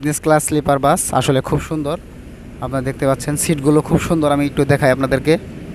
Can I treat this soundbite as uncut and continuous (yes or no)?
yes